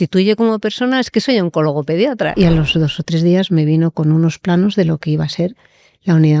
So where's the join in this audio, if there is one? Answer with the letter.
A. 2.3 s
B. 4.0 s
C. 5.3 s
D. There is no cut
A